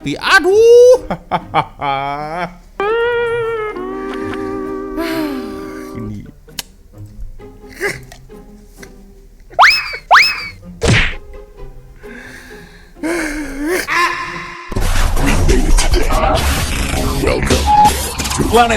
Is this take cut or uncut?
cut